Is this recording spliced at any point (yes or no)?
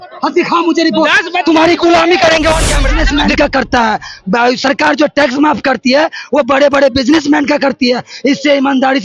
yes